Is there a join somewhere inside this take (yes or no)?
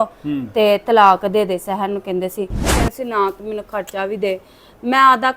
yes